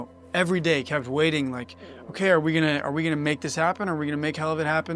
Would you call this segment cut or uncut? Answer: uncut